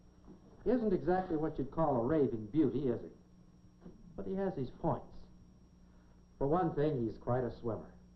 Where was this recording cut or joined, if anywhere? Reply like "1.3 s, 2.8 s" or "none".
1.5 s

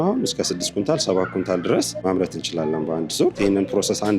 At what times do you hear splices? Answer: 1.9 s, 3.4 s

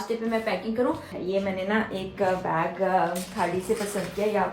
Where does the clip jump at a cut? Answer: 1.1 s

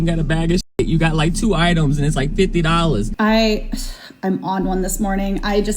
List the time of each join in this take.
3.1 s

